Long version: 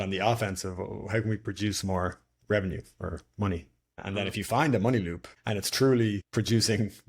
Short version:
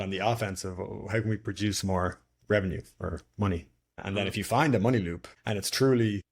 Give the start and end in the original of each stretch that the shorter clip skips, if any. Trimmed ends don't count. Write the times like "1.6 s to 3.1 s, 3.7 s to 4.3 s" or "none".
none